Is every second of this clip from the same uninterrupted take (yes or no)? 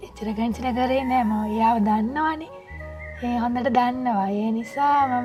yes